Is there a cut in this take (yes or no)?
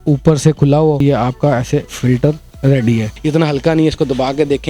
yes